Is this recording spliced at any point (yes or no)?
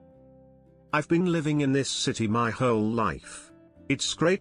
yes